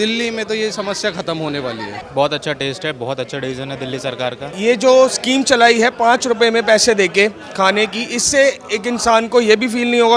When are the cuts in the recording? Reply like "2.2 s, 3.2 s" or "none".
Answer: 2.0 s, 4.5 s